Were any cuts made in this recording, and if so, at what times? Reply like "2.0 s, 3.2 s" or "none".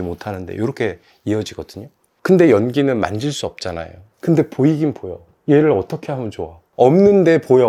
none